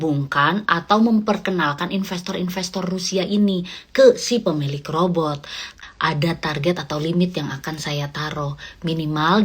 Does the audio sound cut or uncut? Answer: cut